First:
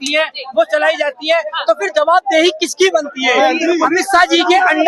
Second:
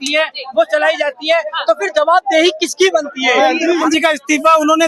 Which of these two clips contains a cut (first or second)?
second